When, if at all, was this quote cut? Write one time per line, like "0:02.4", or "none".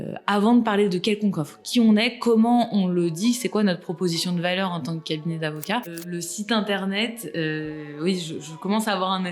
0:06.0